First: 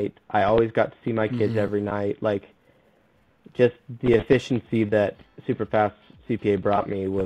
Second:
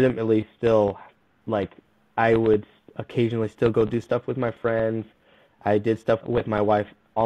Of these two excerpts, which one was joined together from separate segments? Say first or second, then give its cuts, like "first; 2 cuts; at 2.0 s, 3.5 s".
second; 1 cut; at 6.2 s